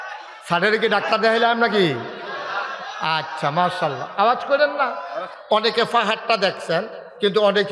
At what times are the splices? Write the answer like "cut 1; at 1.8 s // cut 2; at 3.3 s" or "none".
cut 1; at 5.3 s